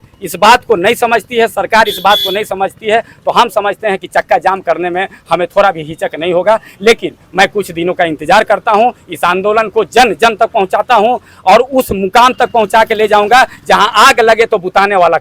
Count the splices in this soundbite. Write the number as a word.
zero